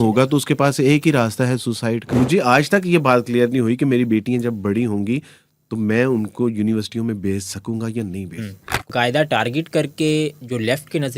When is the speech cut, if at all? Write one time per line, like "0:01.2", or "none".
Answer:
0:02.1
0:08.9

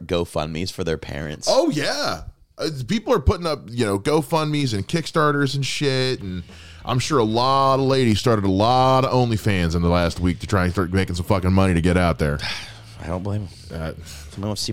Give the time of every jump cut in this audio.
none

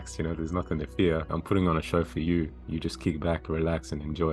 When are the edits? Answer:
0:01.3
0:02.6

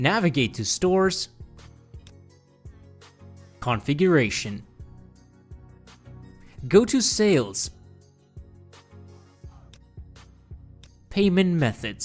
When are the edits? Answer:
0:01.3
0:03.6
0:04.7
0:06.6
0:07.6
0:09.7
0:11.1

